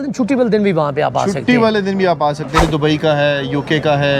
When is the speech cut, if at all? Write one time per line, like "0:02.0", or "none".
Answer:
0:02.6